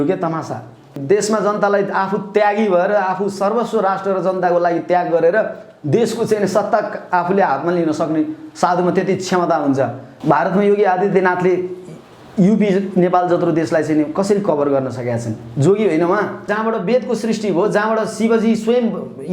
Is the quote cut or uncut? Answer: cut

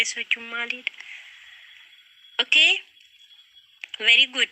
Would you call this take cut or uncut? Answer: uncut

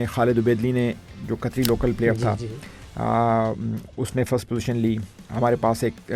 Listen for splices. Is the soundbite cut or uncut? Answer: uncut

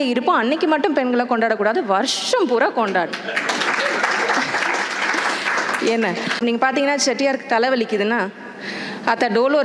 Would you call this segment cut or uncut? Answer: cut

